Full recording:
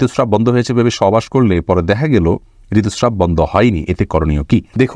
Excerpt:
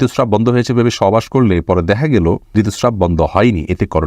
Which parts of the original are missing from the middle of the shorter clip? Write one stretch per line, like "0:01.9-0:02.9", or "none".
0:02.4-0:02.6